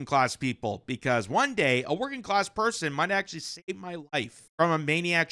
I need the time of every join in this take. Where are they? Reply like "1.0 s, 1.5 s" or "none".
4.4 s